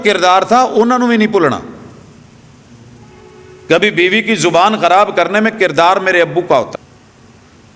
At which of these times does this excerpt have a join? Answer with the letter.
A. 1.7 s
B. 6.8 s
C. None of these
B